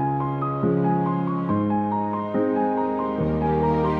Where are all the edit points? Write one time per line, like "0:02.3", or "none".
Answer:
none

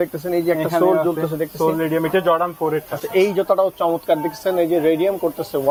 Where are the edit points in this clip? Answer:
none

